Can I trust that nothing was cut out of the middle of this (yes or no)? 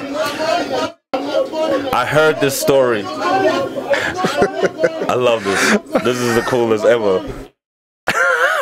yes